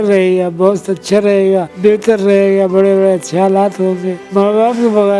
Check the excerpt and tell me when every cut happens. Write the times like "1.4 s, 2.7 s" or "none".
1.7 s, 4.2 s